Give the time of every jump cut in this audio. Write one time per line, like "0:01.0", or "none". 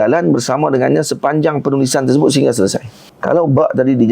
0:03.1